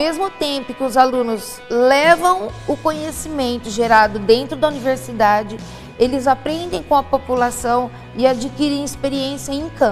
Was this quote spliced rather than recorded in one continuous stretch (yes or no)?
no